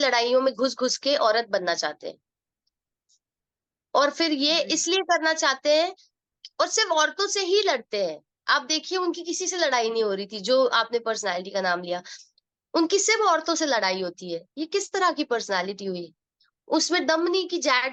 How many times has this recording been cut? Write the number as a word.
zero